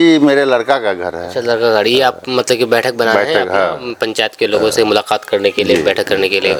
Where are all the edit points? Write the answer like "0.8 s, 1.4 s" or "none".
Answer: none